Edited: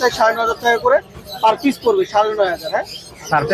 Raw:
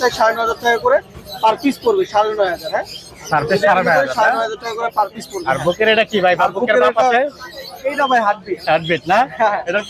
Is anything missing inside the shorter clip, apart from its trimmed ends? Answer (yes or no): no